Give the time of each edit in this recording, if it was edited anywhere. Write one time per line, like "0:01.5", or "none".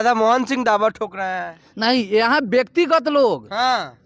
none